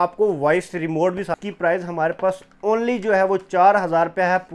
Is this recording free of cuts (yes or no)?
no